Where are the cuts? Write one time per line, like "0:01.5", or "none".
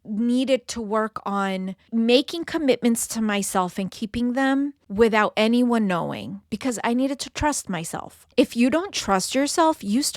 0:01.9
0:04.8
0:08.2

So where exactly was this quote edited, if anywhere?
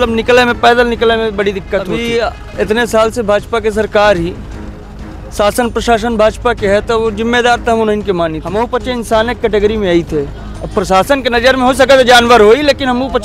0:01.9
0:08.4

